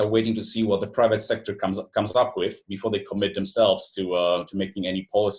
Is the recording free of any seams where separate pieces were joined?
yes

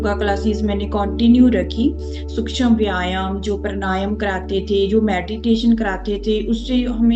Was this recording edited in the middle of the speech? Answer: no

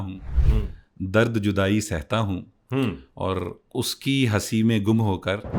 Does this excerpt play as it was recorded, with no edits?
yes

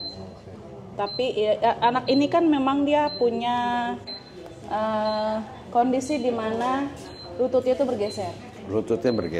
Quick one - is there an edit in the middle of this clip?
no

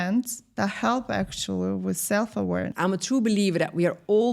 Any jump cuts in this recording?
yes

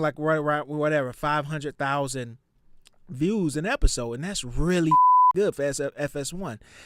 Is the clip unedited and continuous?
yes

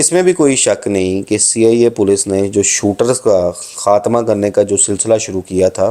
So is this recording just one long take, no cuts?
yes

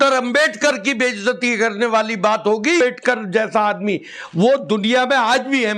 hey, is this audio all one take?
no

